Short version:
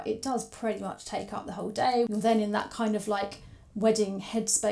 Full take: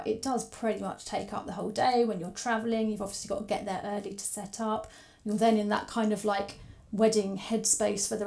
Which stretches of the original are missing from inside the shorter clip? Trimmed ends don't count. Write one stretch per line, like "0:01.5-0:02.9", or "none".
0:02.1-0:05.2